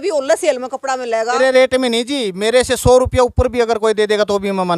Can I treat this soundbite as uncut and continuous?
no; 1 cut; at 1.4 s

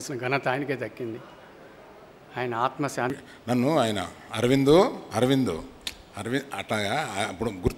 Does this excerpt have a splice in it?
yes; 1 cut; at 3.1 s

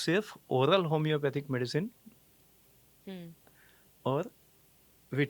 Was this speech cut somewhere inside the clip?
no; 0 cuts

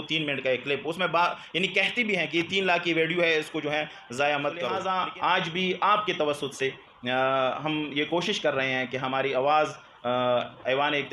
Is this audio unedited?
no; 1 cut; at 4.8 s

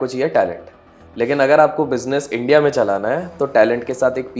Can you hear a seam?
no; 0 cuts

